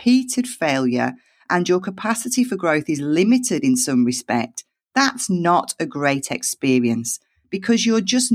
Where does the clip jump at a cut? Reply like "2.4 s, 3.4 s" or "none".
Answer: none

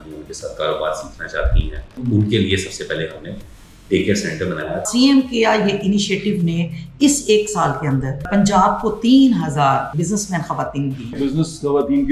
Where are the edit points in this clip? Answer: 2.0 s, 4.8 s, 8.3 s, 9.9 s, 11.2 s

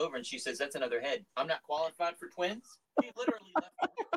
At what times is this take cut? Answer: 1.3 s, 2.8 s

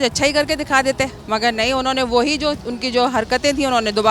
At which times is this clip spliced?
1.2 s

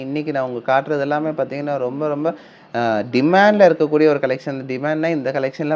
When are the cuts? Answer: none

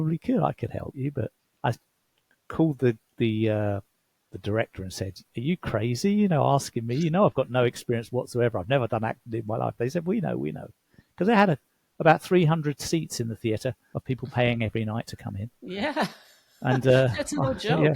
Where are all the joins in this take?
1.4 s, 13.9 s

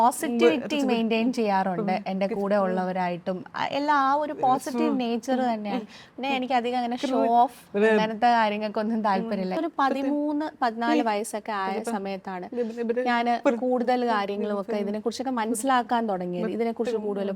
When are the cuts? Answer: 9.6 s

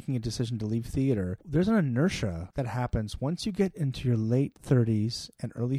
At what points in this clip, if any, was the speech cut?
1.4 s, 2.4 s

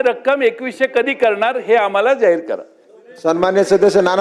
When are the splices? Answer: none

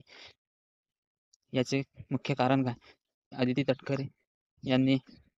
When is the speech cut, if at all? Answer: 3.3 s

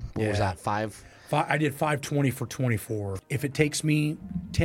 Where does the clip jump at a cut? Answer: 3.1 s

